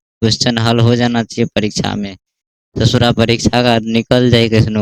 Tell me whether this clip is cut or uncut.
uncut